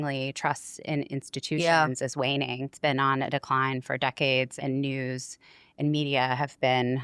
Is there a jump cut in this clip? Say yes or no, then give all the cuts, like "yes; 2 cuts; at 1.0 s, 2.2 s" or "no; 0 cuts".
yes; 2 cuts; at 2.7 s, 4.5 s